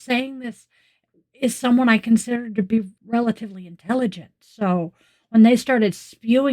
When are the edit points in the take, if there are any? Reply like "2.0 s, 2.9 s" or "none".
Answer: 3.0 s